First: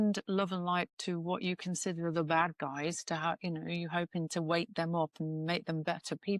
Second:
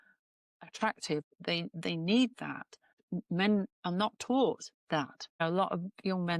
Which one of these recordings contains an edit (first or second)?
second